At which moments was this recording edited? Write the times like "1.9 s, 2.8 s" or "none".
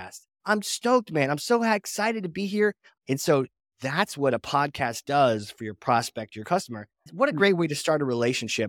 2.9 s, 7.0 s